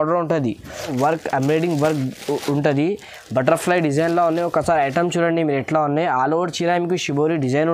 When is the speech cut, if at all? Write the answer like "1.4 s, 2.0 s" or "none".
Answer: 0.9 s